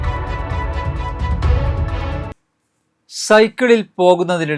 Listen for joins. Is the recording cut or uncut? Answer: cut